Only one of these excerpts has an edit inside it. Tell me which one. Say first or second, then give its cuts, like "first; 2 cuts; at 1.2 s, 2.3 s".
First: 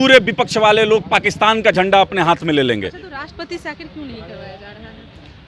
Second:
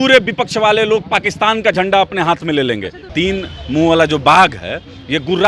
second; 1 cut; at 3.0 s